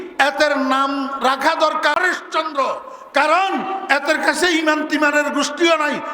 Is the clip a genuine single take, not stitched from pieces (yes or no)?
no